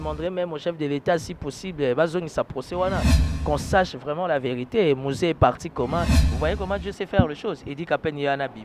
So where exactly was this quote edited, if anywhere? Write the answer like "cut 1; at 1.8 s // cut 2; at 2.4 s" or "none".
cut 1; at 6.2 s